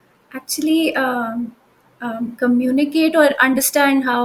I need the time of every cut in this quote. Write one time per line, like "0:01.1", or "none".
none